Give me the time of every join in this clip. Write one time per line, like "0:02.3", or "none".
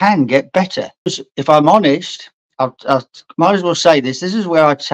0:01.1